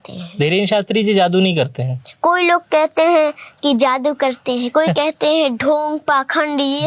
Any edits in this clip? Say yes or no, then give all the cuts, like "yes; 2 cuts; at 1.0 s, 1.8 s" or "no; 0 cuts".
no; 0 cuts